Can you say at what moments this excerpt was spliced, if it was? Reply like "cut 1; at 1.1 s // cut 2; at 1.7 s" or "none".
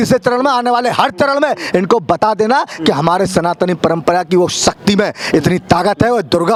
none